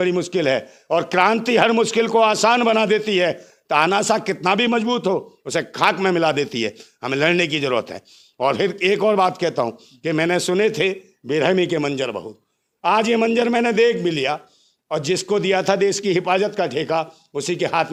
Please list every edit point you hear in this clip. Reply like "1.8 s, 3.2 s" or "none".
none